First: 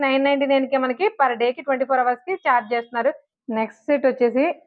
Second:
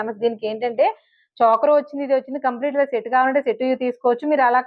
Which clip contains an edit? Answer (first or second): first